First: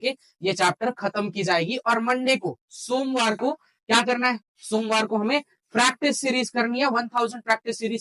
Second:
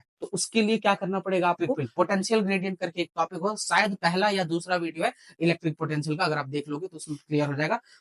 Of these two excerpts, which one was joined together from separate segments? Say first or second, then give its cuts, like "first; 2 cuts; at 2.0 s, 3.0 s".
second; 1 cut; at 1.8 s